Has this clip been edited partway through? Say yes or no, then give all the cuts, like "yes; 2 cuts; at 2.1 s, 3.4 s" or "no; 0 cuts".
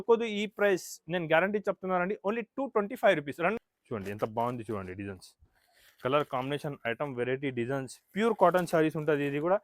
yes; 1 cut; at 3.6 s